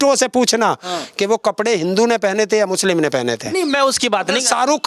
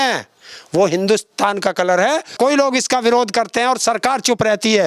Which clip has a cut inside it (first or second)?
second